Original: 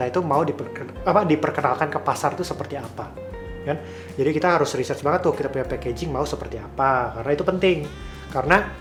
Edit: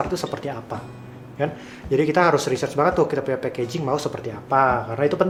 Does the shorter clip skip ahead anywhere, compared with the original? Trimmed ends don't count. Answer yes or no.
no